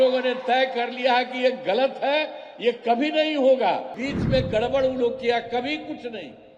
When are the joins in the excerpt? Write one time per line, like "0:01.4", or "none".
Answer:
0:04.0